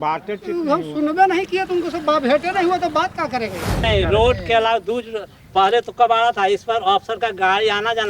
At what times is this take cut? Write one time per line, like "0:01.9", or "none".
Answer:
0:03.8